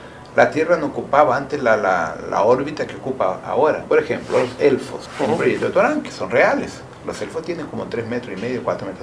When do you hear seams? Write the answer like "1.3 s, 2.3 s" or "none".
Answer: 3.8 s, 5.0 s, 6.9 s